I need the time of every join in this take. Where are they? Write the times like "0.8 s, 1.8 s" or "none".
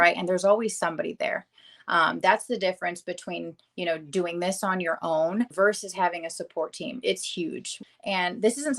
5.5 s, 7.7 s